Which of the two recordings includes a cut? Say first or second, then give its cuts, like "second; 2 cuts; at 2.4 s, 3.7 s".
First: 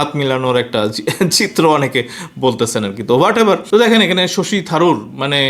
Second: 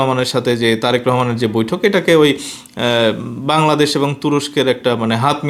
first; 1 cut; at 3.6 s